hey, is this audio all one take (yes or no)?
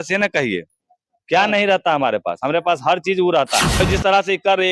no